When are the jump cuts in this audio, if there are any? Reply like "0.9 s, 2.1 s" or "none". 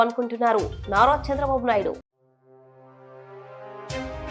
none